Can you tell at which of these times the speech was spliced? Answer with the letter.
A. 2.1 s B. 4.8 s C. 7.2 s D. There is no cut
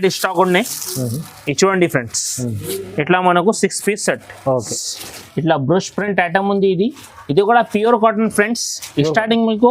B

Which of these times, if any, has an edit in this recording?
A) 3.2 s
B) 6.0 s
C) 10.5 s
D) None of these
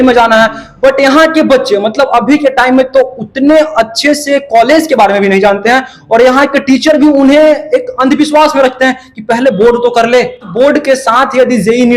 C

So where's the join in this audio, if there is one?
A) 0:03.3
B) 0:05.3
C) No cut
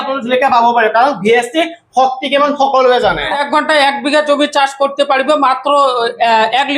A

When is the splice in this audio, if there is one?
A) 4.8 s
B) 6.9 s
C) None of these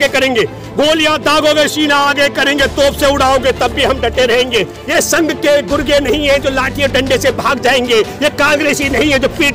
A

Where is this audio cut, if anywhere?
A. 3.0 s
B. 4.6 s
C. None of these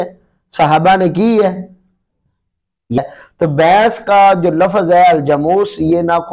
A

